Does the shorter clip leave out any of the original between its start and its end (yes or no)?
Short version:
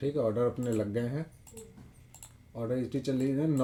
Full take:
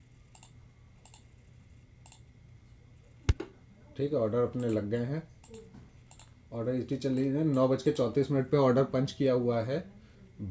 no